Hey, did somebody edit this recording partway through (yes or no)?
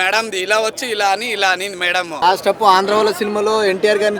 yes